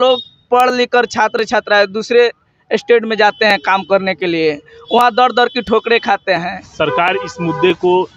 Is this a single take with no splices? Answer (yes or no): no